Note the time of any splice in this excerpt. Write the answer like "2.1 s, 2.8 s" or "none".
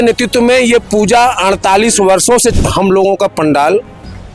2.6 s

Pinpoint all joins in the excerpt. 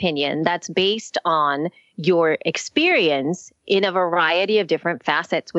none

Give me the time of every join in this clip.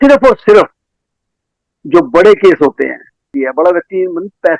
3.3 s

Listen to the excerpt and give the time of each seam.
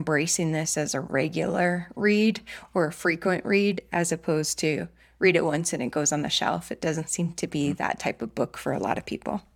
none

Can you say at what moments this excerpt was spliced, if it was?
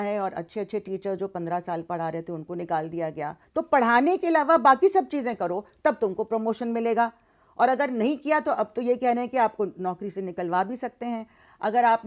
3.4 s

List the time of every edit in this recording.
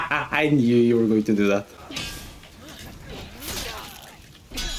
1.7 s

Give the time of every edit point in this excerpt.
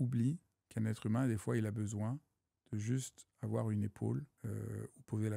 4.3 s

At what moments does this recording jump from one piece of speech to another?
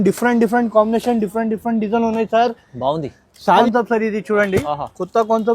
3.6 s

